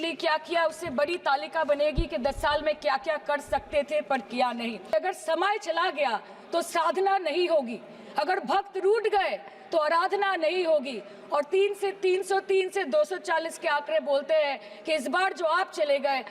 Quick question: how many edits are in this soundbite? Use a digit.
1